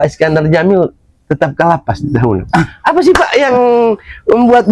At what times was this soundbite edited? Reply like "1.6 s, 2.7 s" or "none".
none